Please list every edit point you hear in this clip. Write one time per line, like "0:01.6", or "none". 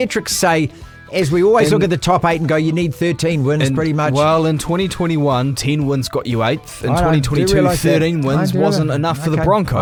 none